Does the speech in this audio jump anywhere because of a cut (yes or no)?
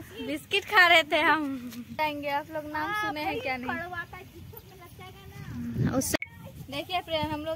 yes